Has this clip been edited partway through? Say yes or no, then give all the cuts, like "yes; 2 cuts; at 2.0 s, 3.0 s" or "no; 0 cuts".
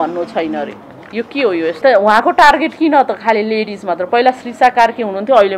yes; 1 cut; at 1.8 s